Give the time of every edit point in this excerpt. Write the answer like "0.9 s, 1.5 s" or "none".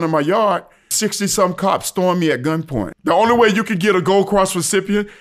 0.9 s, 2.9 s